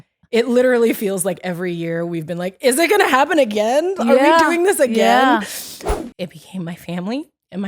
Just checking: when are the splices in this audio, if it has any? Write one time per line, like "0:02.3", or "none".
0:05.9